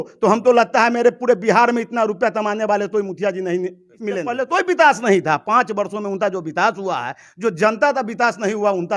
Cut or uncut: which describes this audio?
cut